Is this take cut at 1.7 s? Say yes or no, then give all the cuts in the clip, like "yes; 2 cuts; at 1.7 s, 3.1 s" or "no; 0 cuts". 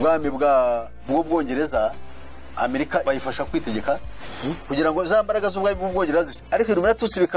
no; 2 cuts; at 3.0 s, 6.4 s